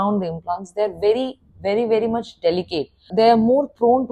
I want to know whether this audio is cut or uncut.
cut